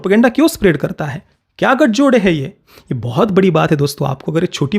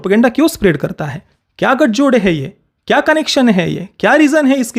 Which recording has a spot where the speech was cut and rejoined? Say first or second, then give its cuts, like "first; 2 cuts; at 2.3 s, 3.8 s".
first; 1 cut; at 2.7 s